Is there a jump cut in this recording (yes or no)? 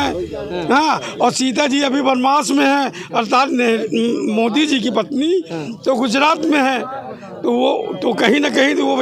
no